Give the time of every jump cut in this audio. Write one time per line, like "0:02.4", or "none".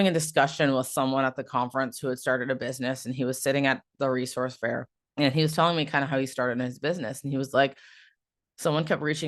0:05.0